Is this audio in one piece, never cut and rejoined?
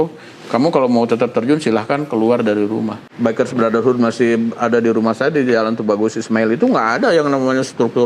no; 1 cut; at 3.0 s

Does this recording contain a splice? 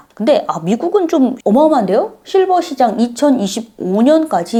no; 0 cuts

